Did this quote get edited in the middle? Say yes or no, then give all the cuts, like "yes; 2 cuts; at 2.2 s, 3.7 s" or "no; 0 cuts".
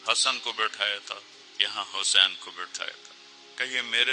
no; 0 cuts